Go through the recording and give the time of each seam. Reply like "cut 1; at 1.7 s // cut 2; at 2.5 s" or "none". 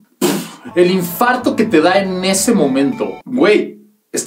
cut 1; at 3.2 s